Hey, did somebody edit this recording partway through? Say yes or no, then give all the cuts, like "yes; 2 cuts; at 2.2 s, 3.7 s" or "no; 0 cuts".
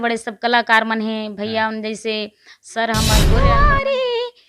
yes; 1 cut; at 3.3 s